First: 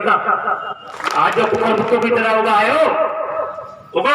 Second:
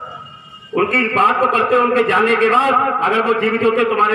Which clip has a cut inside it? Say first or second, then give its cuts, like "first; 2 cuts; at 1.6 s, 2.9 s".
first; 1 cut; at 1.0 s